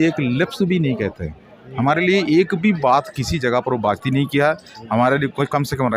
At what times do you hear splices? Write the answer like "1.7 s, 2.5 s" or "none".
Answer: none